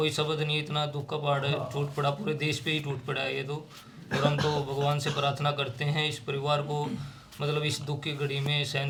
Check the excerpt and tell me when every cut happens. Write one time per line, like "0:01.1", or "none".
none

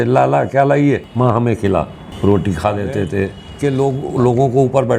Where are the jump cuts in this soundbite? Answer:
0:01.1
0:03.4

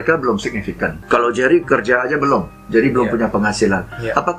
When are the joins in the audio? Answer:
0:01.0

